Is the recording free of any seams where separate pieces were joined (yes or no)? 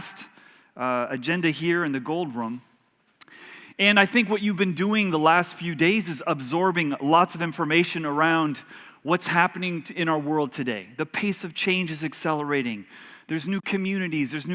no